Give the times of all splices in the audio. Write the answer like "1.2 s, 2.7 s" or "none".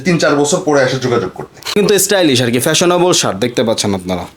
1.7 s